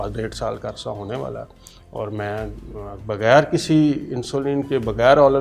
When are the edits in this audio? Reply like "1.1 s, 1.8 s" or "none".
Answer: none